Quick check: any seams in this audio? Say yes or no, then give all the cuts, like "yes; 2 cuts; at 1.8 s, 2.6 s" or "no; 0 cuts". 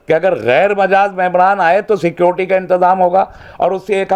no; 0 cuts